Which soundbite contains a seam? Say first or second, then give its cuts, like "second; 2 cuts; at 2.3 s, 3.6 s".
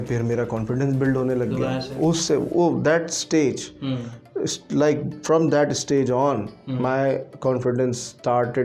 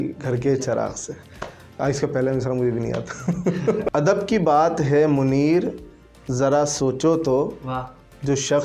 second; 1 cut; at 3.8 s